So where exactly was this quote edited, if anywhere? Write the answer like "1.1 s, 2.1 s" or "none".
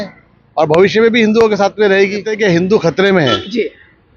2.3 s